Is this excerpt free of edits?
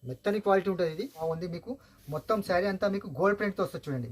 no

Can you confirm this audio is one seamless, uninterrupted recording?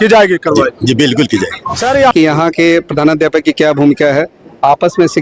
no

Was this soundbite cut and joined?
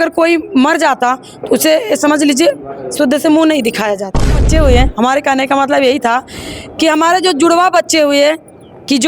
yes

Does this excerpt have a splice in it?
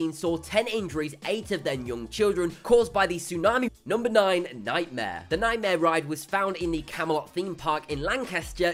no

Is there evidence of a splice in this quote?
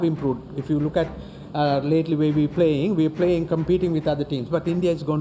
no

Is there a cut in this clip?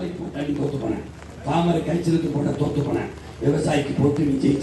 no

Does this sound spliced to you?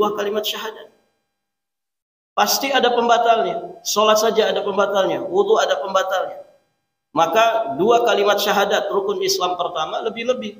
no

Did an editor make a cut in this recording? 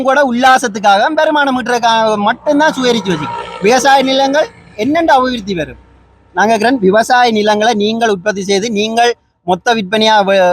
no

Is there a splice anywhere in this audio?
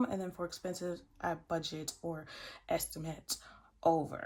no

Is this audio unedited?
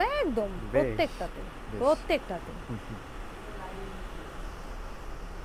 yes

